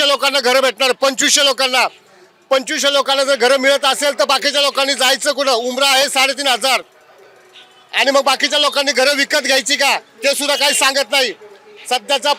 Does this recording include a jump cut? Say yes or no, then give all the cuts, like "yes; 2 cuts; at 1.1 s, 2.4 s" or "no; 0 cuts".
no; 0 cuts